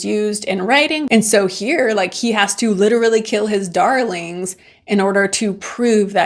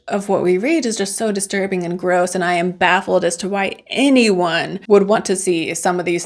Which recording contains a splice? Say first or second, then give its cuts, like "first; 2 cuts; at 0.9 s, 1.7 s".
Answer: first; 1 cut; at 1.0 s